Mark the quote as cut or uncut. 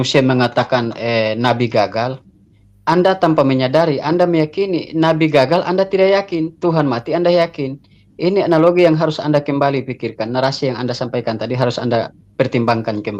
uncut